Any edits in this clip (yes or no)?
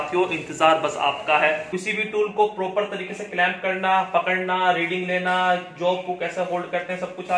yes